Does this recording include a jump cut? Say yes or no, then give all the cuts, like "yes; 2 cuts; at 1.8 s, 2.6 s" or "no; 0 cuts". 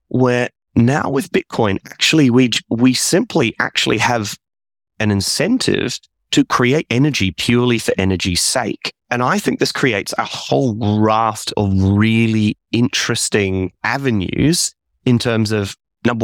no; 0 cuts